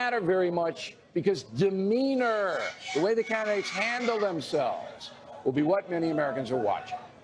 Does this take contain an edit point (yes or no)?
no